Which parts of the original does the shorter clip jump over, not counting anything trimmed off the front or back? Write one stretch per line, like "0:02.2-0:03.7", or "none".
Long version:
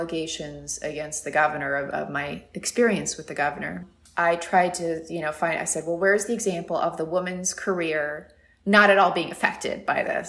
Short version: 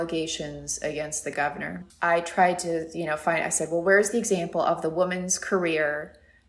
0:01.3-0:03.5